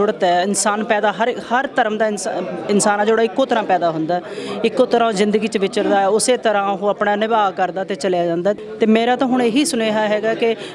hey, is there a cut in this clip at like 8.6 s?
yes; 1 cut; at 8.6 s

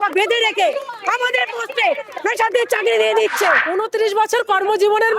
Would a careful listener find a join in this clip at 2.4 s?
no; 1 cut; at 3.6 s

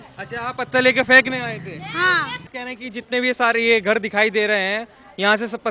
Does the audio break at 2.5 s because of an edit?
yes; 1 cut; at 2.5 s

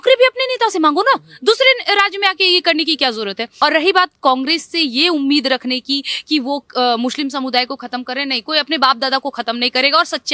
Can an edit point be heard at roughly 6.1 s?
no; 1 cut; at 3.4 s

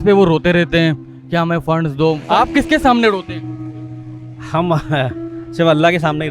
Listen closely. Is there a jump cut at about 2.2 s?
no; 0 cuts

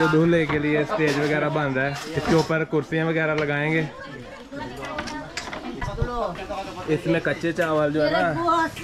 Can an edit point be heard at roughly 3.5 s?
no; 1 cut; at 5.8 s

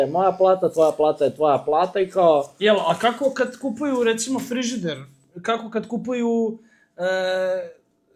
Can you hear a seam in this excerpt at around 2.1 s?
no; 0 cuts

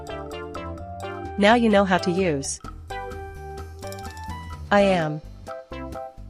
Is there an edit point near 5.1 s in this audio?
no; 1 cut; at 1.3 s

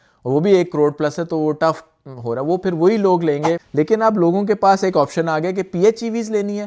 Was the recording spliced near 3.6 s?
yes; 1 cut; at 3.6 s

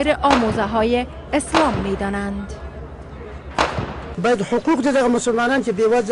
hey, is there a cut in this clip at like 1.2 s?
yes; 1 cut; at 1.2 s

